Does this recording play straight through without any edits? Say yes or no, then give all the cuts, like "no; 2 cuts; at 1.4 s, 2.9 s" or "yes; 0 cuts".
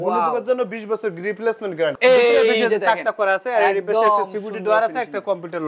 no; 1 cut; at 1.9 s